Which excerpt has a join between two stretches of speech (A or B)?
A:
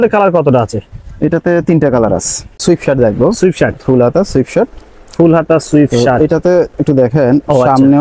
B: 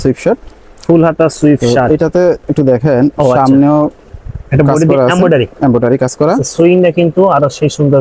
A